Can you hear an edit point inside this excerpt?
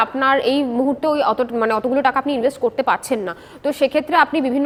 no; 0 cuts

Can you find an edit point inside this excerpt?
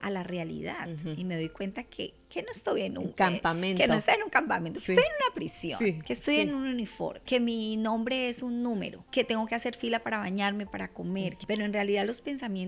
yes; 3 cuts; at 7.2 s, 9.0 s, 11.4 s

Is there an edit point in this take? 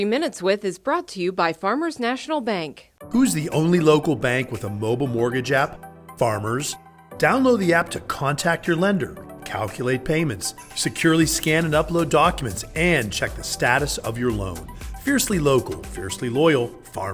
no; 0 cuts

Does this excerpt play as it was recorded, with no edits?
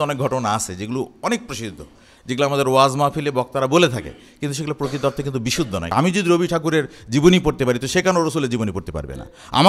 no; 1 cut; at 5.9 s

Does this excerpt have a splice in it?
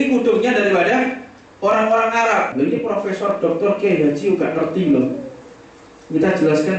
yes; 1 cut; at 2.5 s

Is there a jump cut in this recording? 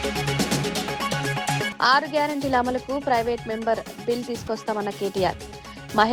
yes; 1 cut; at 1.7 s

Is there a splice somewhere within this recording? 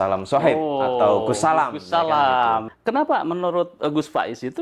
yes; 1 cut; at 2.7 s

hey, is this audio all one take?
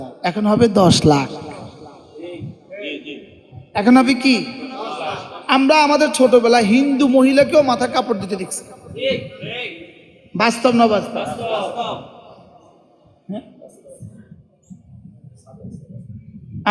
yes; 0 cuts

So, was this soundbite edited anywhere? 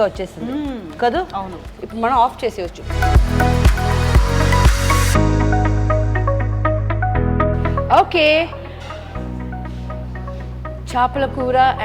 yes; 1 cut; at 2.8 s

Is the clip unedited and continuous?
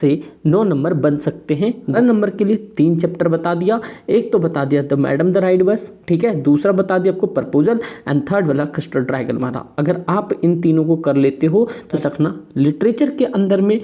no; 2 cuts; at 1.9 s, 12.0 s

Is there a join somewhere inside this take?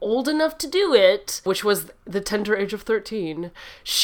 no; 0 cuts

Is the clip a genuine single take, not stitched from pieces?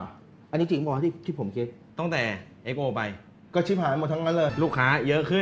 no; 2 cuts; at 1.8 s, 4.5 s

